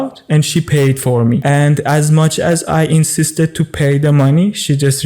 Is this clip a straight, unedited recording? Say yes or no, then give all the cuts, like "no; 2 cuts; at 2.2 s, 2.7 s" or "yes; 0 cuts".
no; 1 cut; at 1.4 s